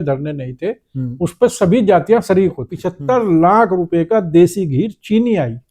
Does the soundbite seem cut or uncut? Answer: cut